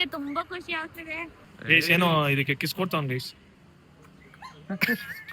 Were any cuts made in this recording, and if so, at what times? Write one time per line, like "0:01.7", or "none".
0:03.6